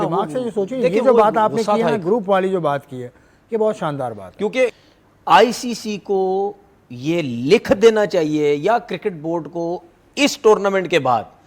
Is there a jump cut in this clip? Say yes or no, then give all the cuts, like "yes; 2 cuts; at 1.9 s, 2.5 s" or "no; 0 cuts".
yes; 1 cut; at 4.8 s